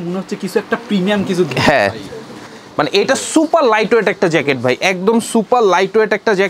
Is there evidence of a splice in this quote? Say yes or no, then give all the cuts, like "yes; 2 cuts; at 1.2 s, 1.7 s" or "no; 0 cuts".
no; 0 cuts